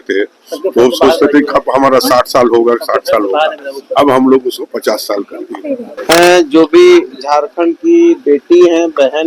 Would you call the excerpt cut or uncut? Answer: cut